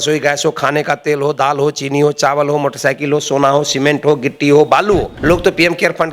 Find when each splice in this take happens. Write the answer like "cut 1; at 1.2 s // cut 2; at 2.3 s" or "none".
cut 1; at 5.1 s